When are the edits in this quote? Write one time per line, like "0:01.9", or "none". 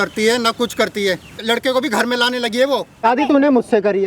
0:01.4
0:03.1